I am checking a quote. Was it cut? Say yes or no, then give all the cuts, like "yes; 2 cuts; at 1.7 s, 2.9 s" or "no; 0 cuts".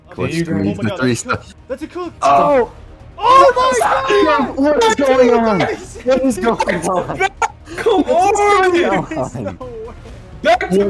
no; 0 cuts